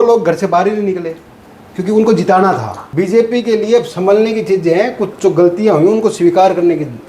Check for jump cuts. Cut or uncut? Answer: cut